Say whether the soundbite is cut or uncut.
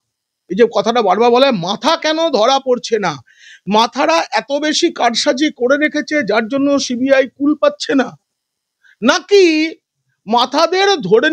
uncut